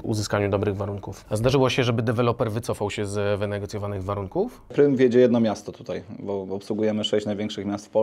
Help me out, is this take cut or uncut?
cut